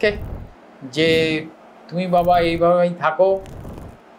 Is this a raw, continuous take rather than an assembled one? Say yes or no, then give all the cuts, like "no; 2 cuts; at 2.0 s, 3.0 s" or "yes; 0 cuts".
yes; 0 cuts